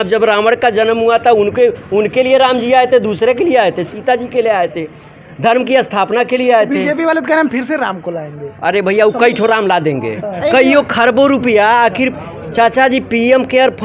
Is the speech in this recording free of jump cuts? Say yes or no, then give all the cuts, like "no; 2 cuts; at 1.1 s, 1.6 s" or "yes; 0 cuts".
no; 1 cut; at 10.2 s